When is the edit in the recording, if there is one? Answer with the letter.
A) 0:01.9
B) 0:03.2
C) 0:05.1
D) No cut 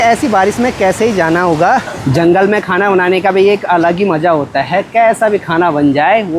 A